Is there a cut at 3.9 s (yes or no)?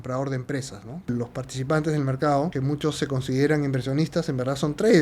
no